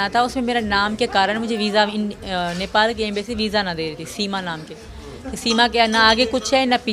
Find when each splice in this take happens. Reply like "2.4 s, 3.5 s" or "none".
none